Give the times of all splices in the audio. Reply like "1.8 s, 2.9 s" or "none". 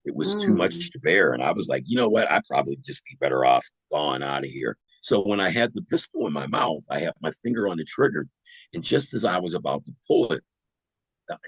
4.9 s

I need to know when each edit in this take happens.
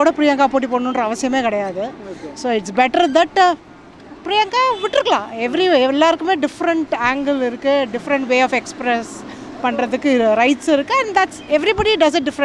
none

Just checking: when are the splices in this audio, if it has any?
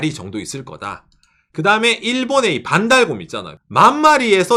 none

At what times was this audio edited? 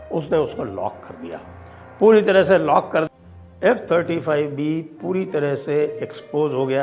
3.1 s

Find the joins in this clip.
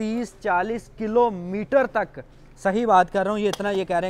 none

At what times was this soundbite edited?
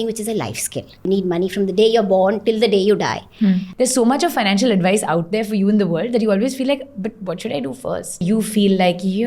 1.1 s, 3.7 s, 8.2 s

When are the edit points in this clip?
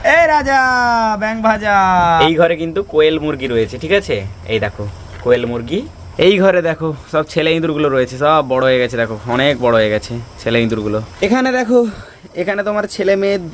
2.1 s, 6.0 s, 11.1 s

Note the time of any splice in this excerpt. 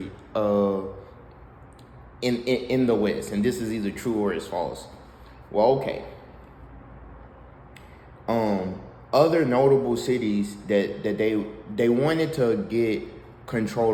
none

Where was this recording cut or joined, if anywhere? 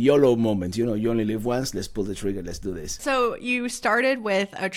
none

